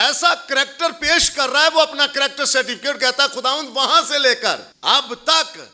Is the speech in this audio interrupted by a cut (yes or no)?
yes